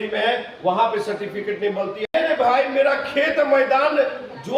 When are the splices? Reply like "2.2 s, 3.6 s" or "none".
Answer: 2.1 s